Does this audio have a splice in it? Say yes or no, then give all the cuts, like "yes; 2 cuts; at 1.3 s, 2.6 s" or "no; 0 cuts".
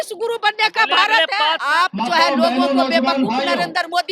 yes; 1 cut; at 1.6 s